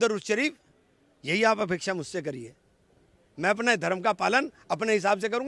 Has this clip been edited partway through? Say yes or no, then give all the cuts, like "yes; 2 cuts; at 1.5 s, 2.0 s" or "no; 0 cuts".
no; 0 cuts